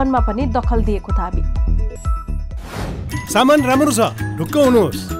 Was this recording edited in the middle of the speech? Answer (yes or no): yes